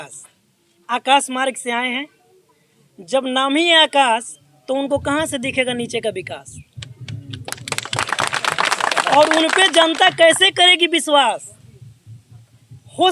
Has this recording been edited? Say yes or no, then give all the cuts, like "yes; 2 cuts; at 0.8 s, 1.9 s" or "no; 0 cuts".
no; 0 cuts